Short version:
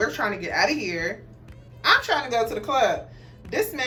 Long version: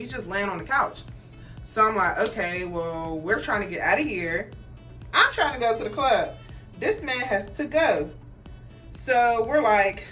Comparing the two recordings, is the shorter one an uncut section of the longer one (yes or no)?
yes